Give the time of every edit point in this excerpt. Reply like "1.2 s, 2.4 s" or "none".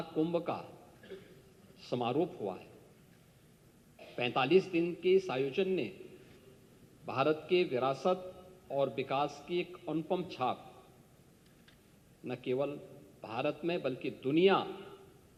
none